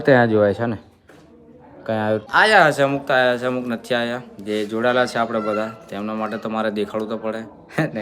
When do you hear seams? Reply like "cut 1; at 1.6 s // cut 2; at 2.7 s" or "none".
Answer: cut 1; at 2.2 s